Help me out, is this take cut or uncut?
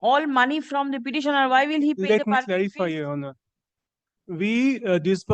uncut